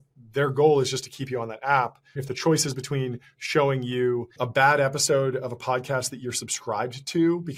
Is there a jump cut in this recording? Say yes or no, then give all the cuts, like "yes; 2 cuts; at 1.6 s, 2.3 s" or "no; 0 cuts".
yes; 2 cuts; at 2.2 s, 4.3 s